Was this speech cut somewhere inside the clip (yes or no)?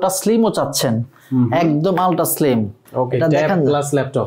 yes